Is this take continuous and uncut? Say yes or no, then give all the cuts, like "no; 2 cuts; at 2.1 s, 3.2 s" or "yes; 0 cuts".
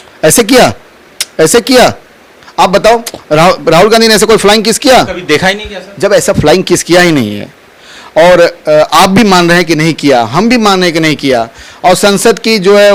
yes; 0 cuts